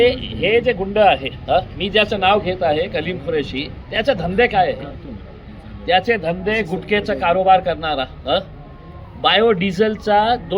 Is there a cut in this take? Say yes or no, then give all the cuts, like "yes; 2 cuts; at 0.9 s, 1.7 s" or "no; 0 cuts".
no; 0 cuts